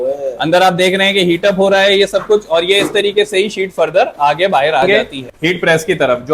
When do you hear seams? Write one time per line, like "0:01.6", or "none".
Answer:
0:04.9